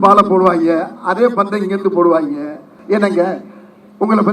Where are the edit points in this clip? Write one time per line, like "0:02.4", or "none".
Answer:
0:02.7